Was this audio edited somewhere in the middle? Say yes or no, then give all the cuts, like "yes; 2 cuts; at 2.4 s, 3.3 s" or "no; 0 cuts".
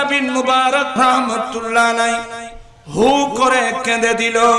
yes; 1 cut; at 0.9 s